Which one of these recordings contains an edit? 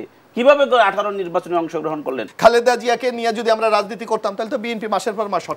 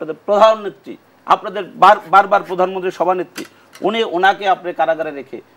first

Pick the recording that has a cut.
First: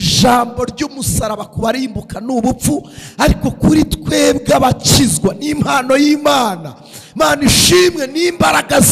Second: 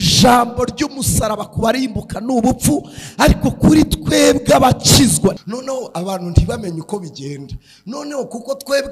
second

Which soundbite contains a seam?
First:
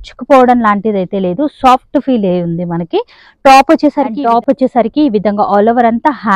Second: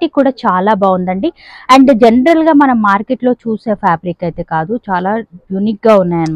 first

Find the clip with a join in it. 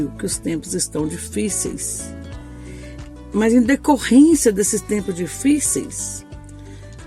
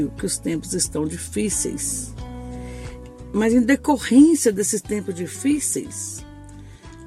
first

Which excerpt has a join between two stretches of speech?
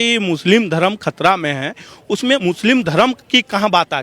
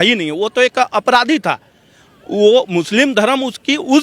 first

